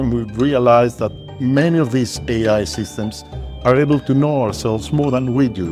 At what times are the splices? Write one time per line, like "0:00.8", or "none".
none